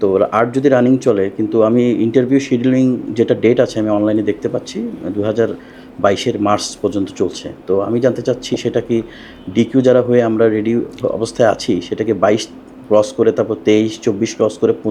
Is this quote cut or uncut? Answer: uncut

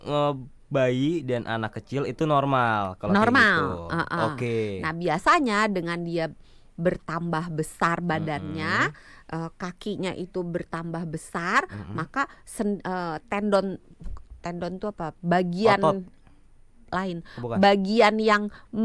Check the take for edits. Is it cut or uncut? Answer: uncut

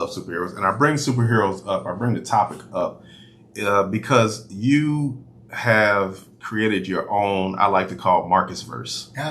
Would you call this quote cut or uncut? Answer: uncut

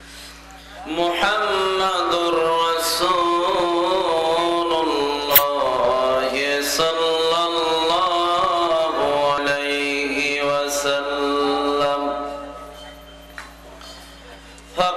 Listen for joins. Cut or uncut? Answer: cut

